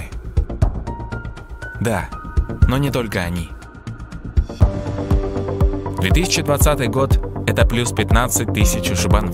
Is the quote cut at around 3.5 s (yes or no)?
no